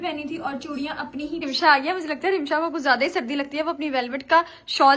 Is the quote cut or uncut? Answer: cut